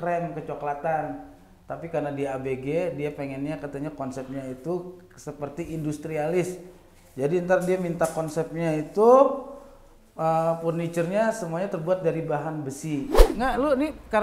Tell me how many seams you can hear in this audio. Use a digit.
1